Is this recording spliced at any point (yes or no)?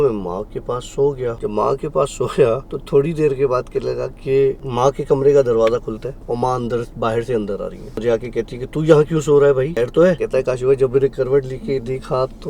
yes